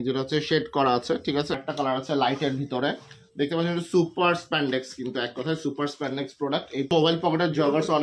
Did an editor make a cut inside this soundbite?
yes; 2 cuts; at 1.6 s, 6.9 s

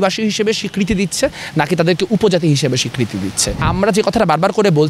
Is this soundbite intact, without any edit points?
no; 1 cut; at 3.6 s

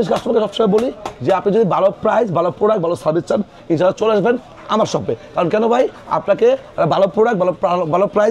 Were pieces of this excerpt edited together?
no; 0 cuts

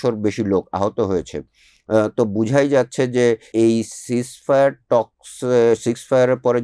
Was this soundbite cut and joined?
yes; 1 cut; at 3.5 s

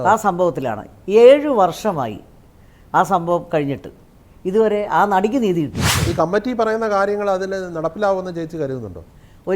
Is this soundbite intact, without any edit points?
no; 1 cut; at 6.0 s

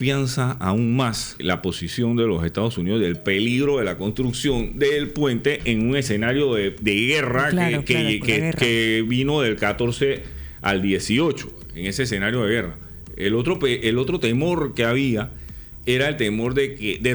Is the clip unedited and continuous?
no; 1 cut; at 1.4 s

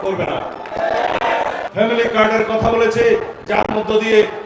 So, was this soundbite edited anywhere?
yes; 1 cut; at 1.6 s

